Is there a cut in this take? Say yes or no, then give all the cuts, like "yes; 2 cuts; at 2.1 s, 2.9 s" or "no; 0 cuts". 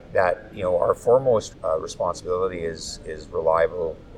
yes; 1 cut; at 1.5 s